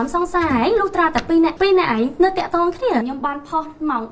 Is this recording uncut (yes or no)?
no